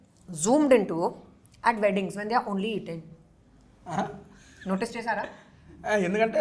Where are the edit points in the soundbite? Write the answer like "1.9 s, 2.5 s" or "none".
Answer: none